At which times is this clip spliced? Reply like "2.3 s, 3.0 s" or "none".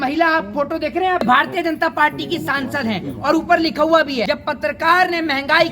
1.2 s, 4.2 s